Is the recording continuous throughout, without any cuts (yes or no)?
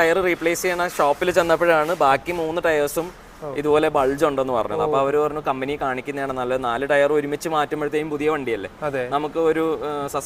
yes